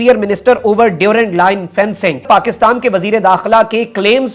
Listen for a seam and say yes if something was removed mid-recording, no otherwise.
no